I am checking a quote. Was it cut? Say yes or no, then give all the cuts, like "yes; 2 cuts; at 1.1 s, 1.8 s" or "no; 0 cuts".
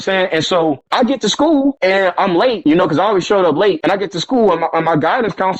yes; 4 cuts; at 0.8 s, 1.8 s, 2.6 s, 3.8 s